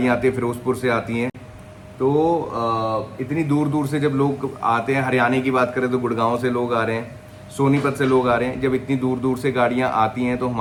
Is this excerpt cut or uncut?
uncut